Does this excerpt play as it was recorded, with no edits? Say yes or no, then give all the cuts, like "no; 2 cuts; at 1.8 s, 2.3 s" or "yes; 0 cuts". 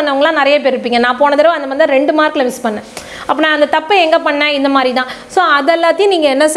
yes; 0 cuts